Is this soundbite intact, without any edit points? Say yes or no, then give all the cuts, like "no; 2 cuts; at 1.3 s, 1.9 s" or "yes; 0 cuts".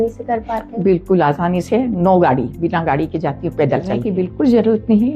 no; 1 cut; at 4.1 s